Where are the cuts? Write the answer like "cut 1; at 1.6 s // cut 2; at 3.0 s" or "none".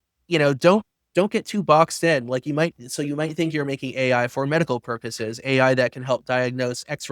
none